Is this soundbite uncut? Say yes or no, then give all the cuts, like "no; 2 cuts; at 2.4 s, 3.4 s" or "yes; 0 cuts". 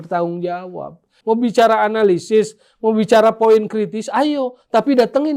no; 1 cut; at 1.2 s